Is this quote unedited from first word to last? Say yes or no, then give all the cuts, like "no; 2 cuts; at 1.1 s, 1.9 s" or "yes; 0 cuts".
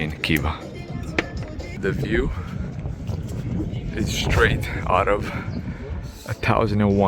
no; 1 cut; at 1.8 s